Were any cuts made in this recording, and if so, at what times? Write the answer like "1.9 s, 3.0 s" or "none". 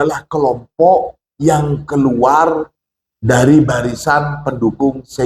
none